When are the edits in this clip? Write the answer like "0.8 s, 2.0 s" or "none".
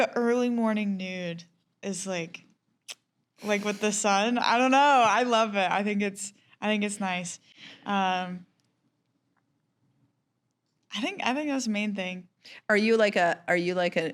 none